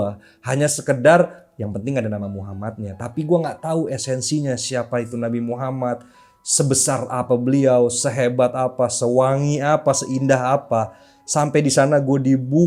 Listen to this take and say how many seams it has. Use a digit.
0